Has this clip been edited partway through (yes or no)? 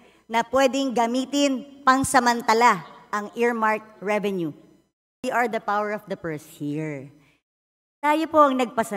yes